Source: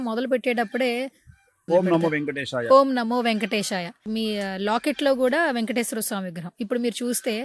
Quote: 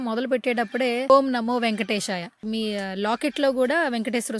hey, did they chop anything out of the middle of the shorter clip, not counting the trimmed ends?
yes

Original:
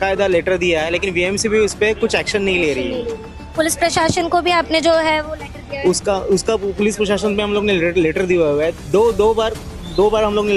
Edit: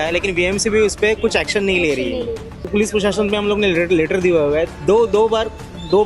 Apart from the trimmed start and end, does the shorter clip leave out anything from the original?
yes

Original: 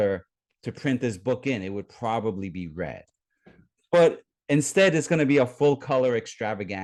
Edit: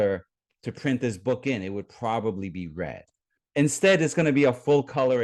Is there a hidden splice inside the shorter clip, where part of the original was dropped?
yes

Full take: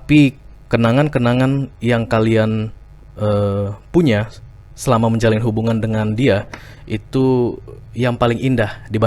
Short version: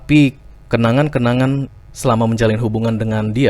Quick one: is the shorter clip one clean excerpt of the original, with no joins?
no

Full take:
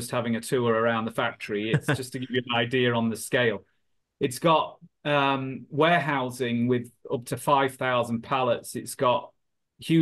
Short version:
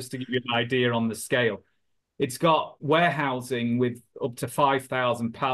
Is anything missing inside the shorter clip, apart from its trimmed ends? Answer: yes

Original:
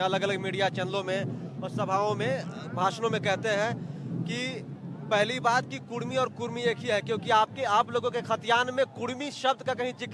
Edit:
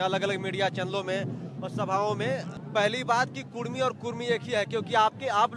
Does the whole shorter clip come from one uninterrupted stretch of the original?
no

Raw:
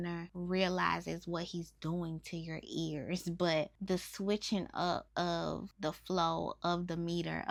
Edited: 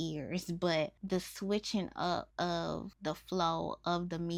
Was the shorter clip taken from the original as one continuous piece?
yes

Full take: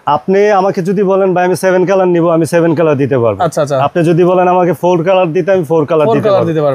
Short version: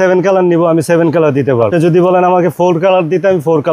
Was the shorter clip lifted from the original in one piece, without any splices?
no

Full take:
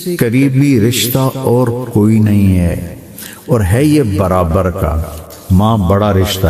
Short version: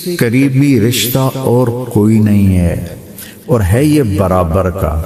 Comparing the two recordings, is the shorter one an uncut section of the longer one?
yes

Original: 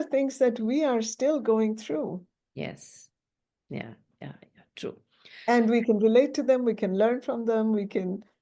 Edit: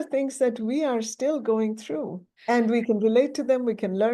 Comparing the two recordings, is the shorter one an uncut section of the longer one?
no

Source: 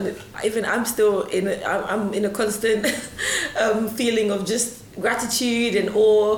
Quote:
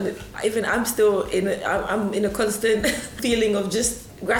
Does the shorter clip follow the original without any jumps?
no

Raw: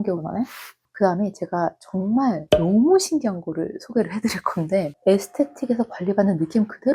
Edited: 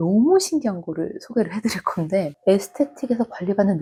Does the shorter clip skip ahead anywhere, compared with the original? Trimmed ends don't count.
no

